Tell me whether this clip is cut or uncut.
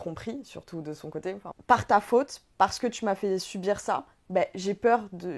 cut